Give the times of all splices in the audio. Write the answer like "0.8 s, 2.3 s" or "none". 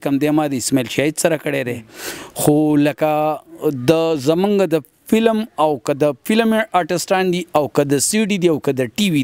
none